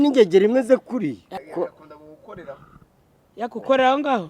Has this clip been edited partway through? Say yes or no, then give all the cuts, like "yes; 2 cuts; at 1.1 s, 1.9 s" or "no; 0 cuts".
yes; 1 cut; at 1.3 s